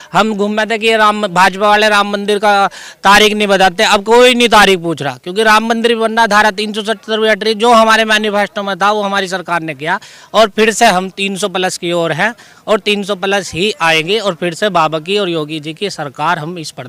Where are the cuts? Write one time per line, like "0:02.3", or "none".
none